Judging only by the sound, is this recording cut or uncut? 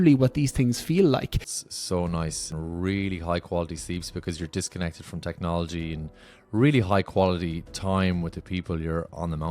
cut